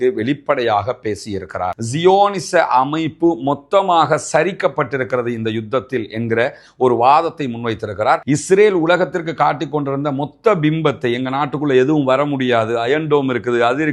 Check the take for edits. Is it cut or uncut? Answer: cut